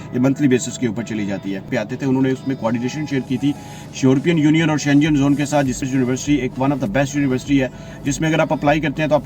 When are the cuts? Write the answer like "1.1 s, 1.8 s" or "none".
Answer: 1.7 s, 5.8 s